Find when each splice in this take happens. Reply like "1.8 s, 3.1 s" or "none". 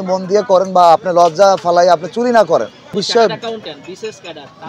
3.0 s